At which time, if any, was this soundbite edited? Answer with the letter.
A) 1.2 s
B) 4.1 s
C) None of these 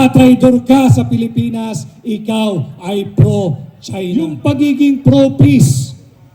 B